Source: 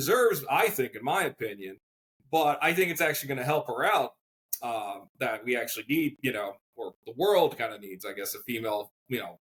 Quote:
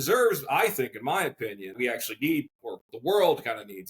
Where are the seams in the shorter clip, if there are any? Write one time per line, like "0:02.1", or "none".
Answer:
0:01.7
0:02.5